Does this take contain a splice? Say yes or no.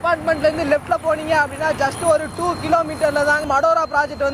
yes